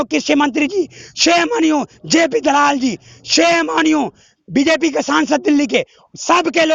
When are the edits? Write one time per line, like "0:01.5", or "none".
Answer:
none